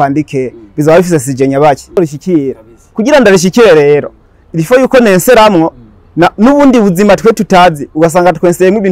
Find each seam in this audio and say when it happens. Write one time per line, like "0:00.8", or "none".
0:02.0